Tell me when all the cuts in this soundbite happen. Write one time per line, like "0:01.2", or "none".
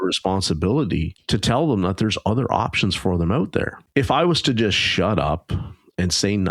0:01.1
0:03.8